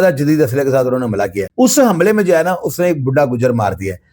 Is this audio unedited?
no; 1 cut; at 1.4 s

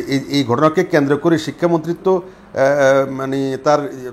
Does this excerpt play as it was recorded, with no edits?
yes; 0 cuts

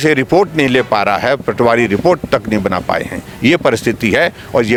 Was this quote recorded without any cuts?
yes; 0 cuts

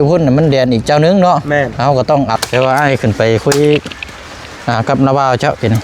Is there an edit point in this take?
yes; 1 cut; at 2.3 s

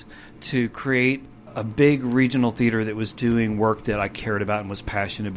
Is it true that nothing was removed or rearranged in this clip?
no; 1 cut; at 1.6 s

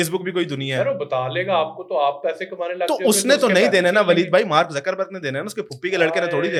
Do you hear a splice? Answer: no; 0 cuts

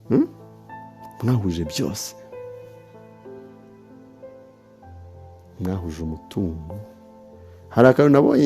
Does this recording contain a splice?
yes; 2 cuts; at 2.1 s, 5.6 s

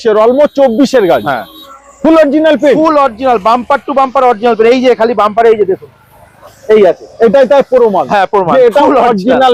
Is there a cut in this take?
no; 0 cuts

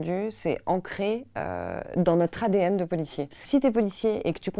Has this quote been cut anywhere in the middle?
no; 0 cuts

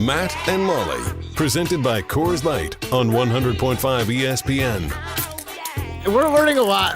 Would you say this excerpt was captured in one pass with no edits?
no; 1 cut; at 5.9 s

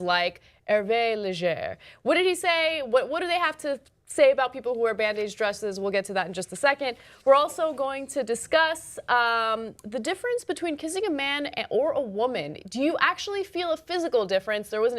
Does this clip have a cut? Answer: yes; 1 cut; at 11.5 s

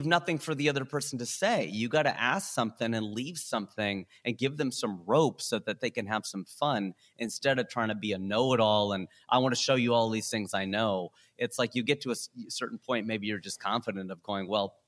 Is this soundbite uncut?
yes; 0 cuts

